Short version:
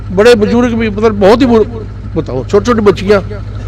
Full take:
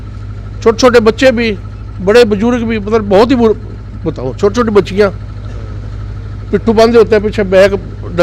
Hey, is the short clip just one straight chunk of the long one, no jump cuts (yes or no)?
yes